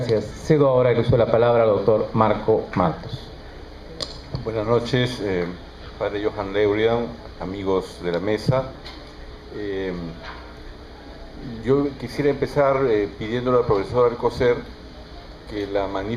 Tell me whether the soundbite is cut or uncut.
cut